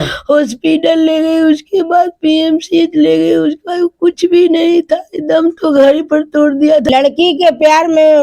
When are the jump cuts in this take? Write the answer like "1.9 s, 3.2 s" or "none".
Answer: 6.9 s